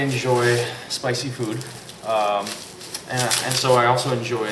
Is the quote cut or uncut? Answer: uncut